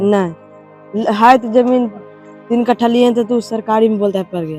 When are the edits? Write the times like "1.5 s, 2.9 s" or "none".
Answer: none